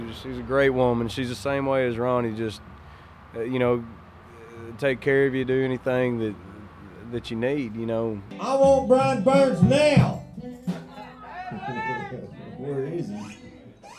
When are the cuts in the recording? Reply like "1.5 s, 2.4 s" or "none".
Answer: 8.3 s